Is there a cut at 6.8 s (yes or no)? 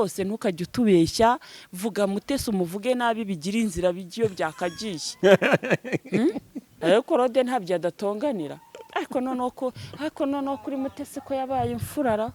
yes